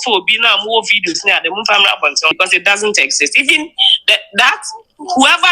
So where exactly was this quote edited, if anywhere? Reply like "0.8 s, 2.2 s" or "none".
2.4 s